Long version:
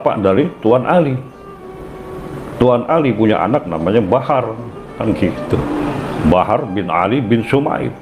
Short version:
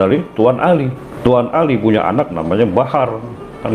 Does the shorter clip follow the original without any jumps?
no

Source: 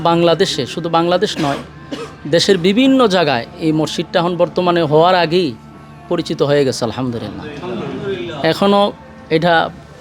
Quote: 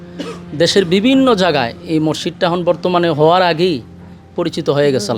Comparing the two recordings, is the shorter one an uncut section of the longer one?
yes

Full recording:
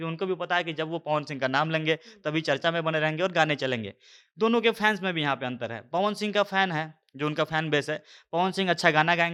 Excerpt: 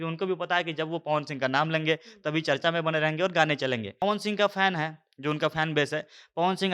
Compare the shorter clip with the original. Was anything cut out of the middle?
yes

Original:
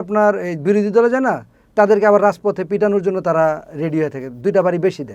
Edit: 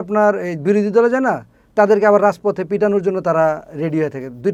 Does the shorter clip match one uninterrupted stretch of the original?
yes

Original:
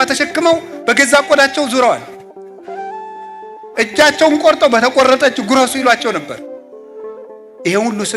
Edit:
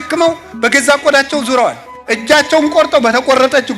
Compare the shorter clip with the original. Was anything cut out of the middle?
yes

